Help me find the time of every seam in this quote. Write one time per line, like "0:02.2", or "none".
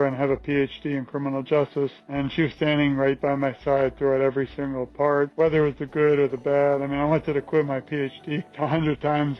0:02.0
0:05.3
0:08.5